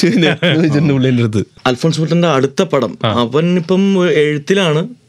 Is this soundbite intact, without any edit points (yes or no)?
no